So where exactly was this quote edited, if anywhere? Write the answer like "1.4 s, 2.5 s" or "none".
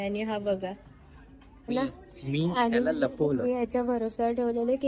1.7 s